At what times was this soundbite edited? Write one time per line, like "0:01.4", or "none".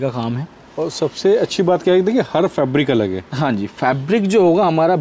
none